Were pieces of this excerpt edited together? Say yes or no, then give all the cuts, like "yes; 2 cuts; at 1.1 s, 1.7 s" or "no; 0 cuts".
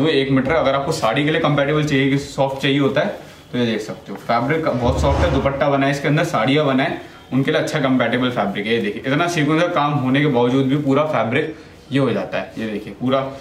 no; 0 cuts